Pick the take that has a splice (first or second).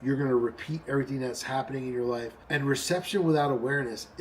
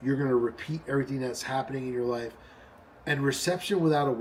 first